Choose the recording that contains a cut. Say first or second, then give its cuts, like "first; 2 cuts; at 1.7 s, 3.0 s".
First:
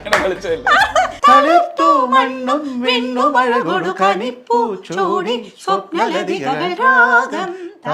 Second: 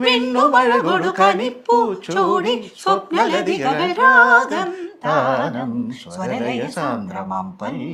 first; 1 cut; at 1.1 s